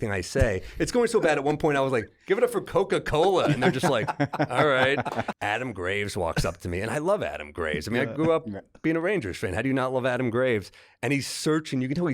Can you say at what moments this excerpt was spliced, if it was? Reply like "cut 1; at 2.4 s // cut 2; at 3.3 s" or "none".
cut 1; at 5.3 s